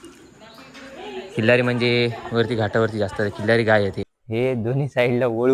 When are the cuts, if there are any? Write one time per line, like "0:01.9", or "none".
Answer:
0:04.1

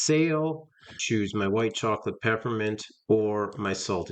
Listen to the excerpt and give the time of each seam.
0:00.9

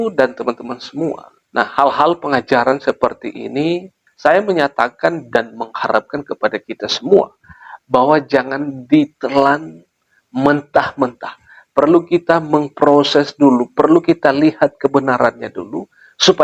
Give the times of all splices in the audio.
0:01.3

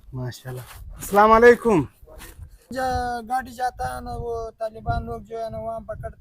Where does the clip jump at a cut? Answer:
0:02.7

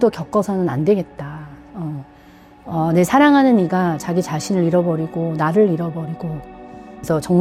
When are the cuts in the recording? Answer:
none

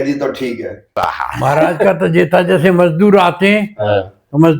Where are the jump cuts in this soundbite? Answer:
0:01.1

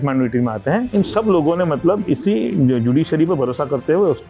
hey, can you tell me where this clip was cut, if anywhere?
none

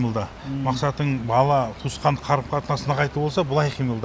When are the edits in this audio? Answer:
none

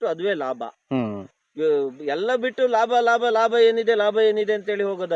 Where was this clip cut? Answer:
none

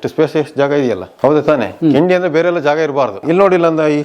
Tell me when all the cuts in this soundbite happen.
0:01.1
0:03.2

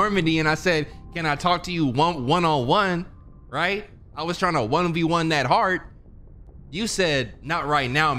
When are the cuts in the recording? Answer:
none

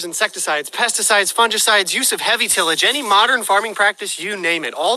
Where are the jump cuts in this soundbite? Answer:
none

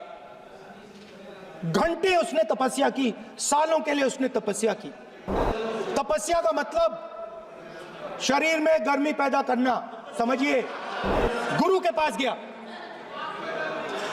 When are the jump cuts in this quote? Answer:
0:05.3
0:11.1

